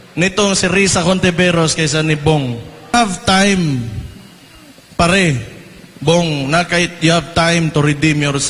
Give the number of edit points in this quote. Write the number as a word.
one